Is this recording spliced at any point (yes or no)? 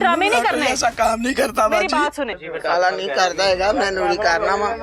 yes